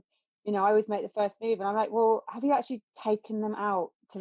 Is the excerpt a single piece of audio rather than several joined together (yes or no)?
no